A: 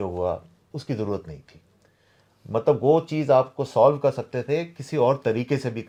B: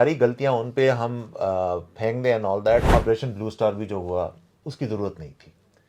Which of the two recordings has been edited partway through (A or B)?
B